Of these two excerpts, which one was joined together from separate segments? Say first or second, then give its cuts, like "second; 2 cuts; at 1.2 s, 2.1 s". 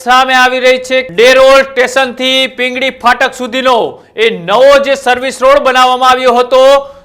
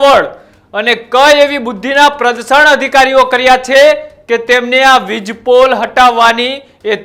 first; 1 cut; at 1.1 s